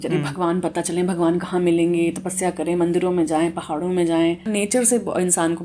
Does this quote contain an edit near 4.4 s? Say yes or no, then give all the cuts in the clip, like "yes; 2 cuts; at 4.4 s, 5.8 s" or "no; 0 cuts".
yes; 1 cut; at 4.4 s